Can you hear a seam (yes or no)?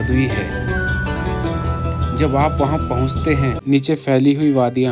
yes